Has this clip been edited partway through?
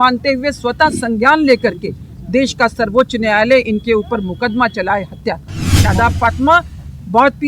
yes; 1 cut; at 5.7 s

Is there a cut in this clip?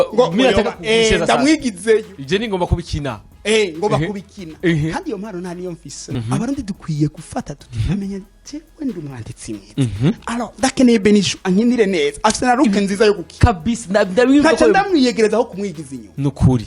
yes; 1 cut; at 6.0 s

